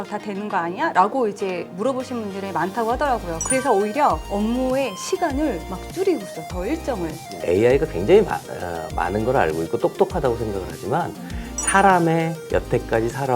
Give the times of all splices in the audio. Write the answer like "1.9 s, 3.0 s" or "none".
7.4 s